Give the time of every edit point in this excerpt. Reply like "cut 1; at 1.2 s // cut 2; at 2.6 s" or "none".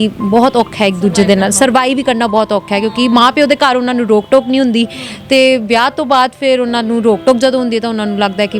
none

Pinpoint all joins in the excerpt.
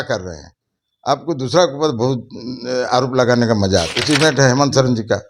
cut 1; at 4.0 s

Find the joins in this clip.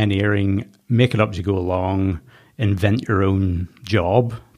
none

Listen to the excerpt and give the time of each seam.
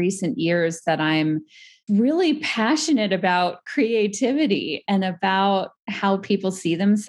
cut 1; at 1.8 s

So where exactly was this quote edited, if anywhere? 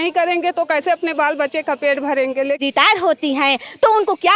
cut 1; at 2.6 s

